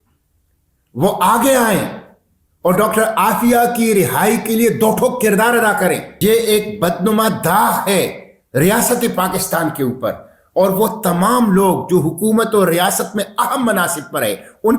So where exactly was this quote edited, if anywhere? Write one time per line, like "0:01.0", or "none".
0:06.1